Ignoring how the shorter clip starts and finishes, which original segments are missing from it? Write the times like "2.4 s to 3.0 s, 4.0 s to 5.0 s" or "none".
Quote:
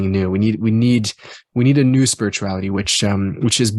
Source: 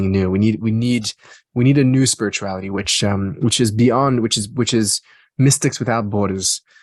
none